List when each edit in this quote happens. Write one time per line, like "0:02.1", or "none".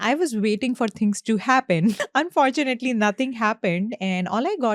0:02.0